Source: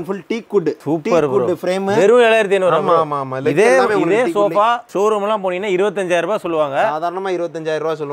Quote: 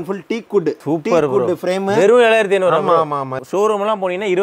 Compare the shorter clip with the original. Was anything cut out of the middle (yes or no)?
yes